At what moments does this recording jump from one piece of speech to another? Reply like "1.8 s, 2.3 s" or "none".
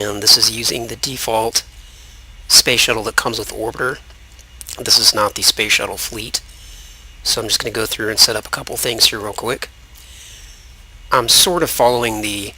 11.3 s

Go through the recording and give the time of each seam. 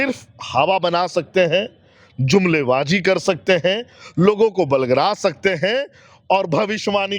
none

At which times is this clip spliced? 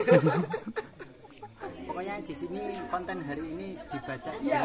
1.7 s

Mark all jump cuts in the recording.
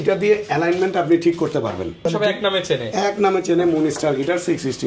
2.1 s

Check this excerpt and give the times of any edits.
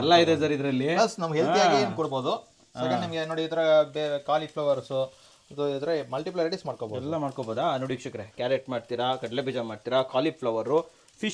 none

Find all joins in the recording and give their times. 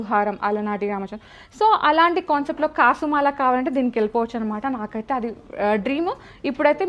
none

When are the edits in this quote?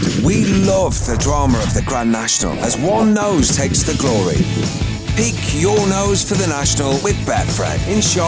none

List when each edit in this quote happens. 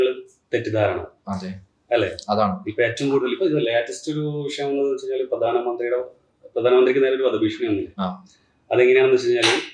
none

